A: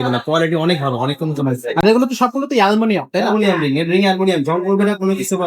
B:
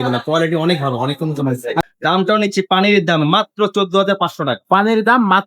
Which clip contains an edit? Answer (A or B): B